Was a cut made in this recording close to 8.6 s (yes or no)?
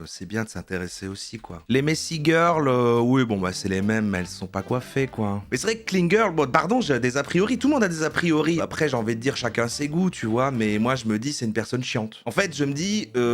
yes